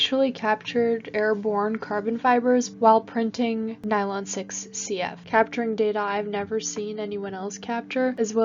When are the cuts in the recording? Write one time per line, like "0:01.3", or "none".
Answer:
0:01.1